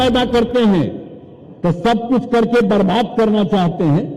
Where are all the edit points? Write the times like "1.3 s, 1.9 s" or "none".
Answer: none